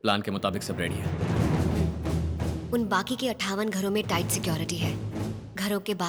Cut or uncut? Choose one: uncut